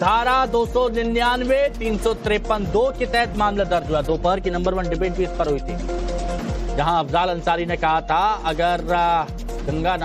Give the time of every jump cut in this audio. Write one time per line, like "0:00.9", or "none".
0:04.6